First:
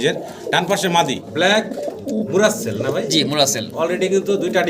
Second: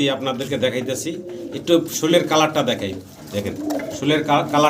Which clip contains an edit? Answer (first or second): first